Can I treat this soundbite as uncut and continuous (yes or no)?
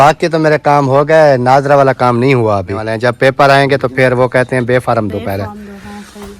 no